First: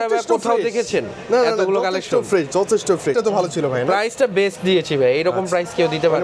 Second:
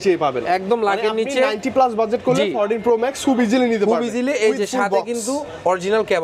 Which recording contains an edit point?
first; 1 cut; at 3.1 s

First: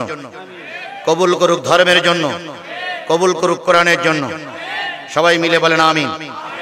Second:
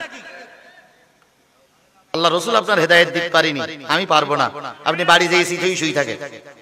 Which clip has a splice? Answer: second; 1 cut; at 2.1 s

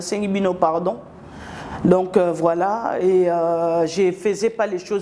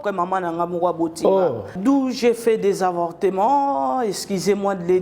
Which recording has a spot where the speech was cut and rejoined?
second; 1 cut; at 1.8 s

